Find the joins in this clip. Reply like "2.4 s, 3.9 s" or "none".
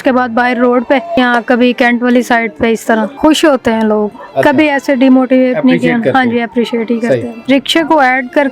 1.1 s, 3.1 s, 7.3 s